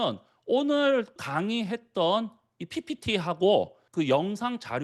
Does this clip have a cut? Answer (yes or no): yes